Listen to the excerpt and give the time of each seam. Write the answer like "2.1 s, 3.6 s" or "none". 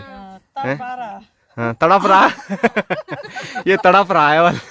none